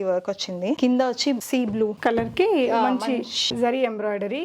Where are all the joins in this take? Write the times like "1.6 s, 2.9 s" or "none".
0.8 s, 2.0 s, 3.5 s